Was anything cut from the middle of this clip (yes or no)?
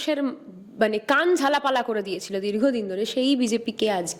no